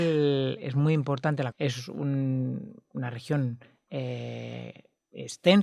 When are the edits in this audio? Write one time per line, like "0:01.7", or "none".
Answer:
0:01.5